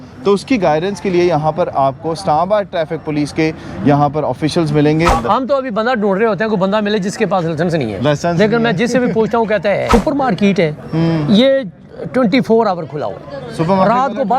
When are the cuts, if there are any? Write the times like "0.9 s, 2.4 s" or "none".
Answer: 5.1 s, 9.9 s